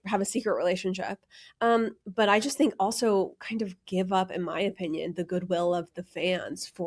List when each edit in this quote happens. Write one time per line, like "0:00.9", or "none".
none

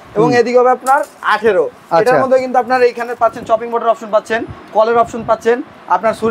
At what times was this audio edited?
none

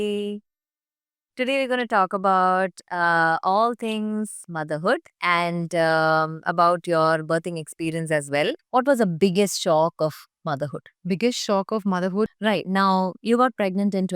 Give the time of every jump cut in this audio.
0:08.6
0:12.3

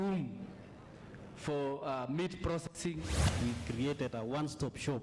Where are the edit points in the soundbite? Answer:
0:03.3

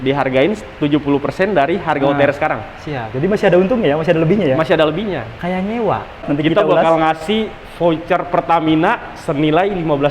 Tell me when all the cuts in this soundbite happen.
0:06.2

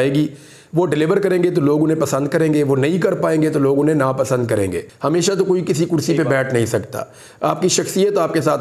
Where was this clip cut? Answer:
0:04.9

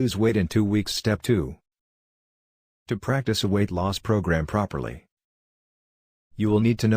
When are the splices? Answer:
0:01.1

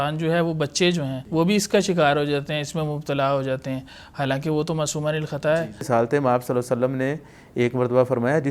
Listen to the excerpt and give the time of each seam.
0:01.2
0:05.9

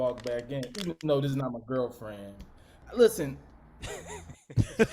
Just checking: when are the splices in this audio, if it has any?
0:02.8

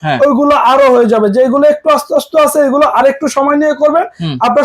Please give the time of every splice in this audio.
none

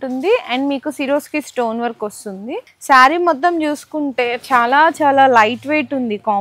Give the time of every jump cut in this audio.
0:02.7

